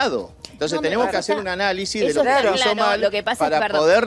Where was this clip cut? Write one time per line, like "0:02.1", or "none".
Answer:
none